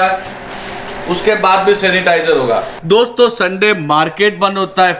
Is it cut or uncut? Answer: cut